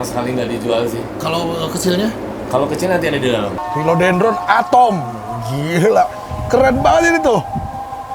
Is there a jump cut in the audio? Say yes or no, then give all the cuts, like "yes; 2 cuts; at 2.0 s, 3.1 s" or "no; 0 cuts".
yes; 1 cut; at 3.6 s